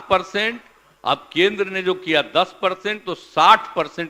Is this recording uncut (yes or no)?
yes